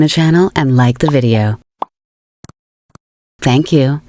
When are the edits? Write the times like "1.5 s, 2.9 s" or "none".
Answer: 2.8 s